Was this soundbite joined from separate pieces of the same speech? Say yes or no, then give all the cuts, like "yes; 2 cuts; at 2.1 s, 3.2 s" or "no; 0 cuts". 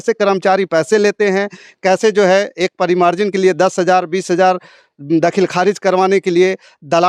no; 0 cuts